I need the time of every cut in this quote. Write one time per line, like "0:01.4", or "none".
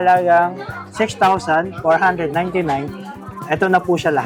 none